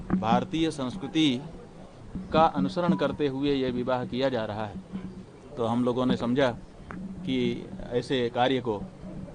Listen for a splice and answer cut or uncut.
uncut